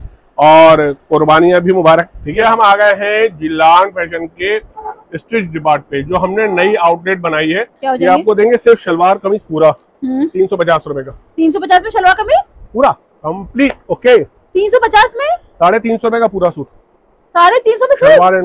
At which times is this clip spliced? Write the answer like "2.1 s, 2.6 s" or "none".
2.3 s, 7.7 s